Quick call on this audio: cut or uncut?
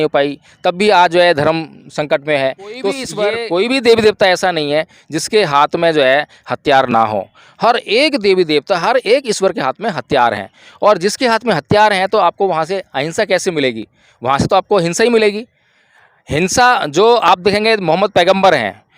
cut